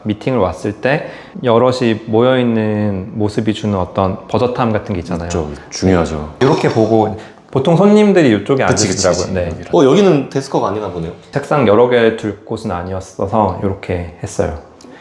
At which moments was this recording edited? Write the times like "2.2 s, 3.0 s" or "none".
none